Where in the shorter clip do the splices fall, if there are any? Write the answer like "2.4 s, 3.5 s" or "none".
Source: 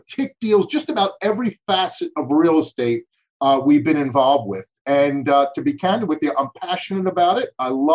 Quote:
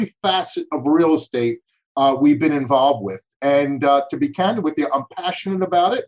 none